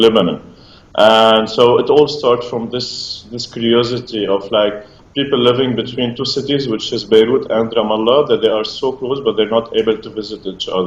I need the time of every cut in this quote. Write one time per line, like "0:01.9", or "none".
0:04.2